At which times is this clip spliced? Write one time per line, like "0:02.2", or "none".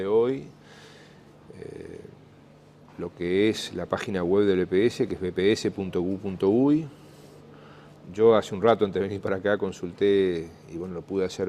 0:06.9